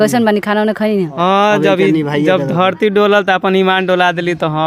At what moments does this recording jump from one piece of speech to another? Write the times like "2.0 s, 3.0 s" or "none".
1.1 s